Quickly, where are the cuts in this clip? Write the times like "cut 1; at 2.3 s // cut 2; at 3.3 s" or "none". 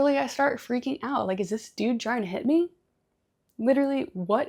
none